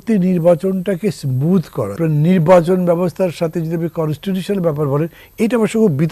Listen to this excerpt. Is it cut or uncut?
cut